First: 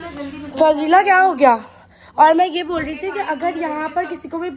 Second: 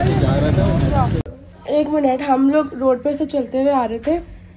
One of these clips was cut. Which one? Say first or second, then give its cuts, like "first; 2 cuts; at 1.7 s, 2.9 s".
second; 1 cut; at 1.2 s